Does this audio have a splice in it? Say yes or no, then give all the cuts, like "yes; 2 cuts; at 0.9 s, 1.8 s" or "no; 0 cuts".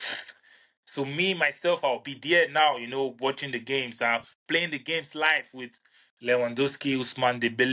no; 0 cuts